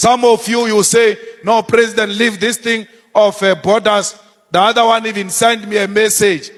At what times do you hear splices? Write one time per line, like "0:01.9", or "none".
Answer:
none